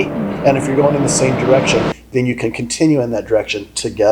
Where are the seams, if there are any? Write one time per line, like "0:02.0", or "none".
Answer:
none